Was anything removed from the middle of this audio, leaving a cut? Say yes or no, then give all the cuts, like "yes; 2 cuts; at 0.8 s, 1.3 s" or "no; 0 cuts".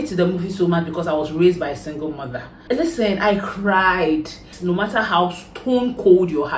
yes; 2 cuts; at 2.5 s, 4.5 s